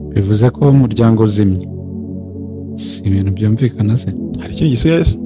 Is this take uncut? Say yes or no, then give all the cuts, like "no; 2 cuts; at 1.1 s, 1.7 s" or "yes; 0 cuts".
no; 2 cuts; at 1.6 s, 3.0 s